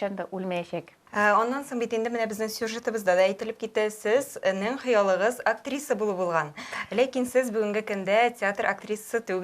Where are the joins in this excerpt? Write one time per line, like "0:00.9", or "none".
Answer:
none